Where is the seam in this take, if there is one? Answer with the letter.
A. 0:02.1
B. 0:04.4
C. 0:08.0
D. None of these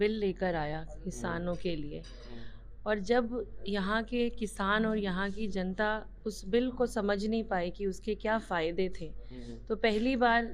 D